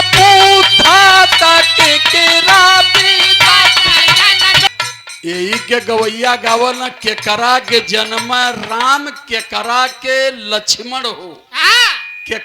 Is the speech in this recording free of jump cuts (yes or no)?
no